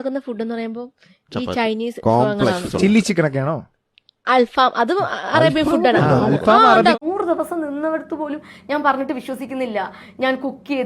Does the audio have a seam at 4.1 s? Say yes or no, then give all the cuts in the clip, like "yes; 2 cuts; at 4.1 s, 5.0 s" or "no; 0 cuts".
no; 1 cut; at 7.0 s